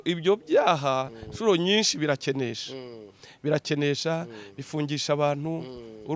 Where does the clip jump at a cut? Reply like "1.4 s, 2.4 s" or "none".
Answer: none